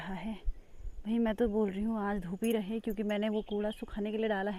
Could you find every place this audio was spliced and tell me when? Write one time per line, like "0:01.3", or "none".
none